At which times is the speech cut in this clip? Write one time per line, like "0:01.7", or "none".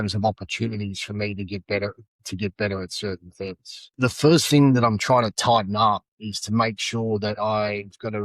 0:03.9